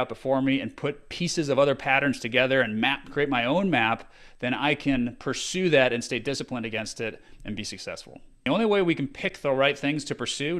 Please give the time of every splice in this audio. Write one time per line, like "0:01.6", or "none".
0:08.5

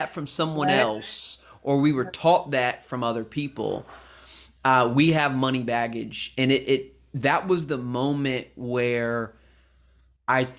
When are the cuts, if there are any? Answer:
none

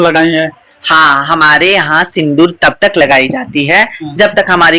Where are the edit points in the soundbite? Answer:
none

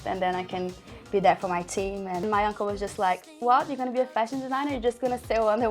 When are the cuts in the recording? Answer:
0:02.2

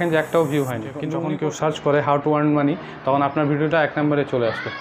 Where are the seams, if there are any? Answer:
0:01.1

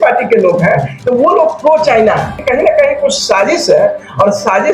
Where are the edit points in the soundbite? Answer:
0:00.9
0:02.4

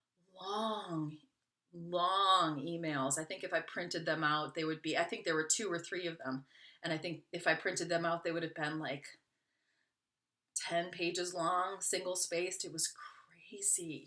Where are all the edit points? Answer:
none

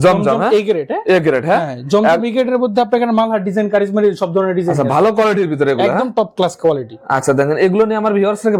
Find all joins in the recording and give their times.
none

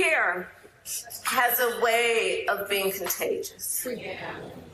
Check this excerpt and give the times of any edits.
none

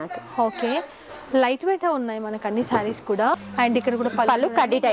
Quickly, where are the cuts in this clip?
0:03.4

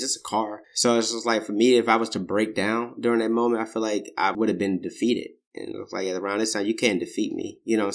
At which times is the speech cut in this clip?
0:04.3

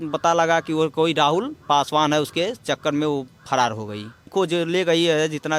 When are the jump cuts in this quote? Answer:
0:04.3

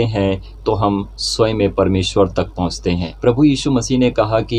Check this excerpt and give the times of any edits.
0:03.1

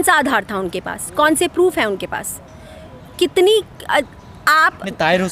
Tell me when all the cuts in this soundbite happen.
none

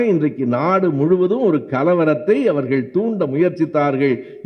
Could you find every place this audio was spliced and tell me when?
none

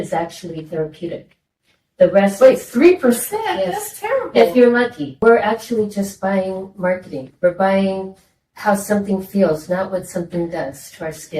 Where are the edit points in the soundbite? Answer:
0:05.0

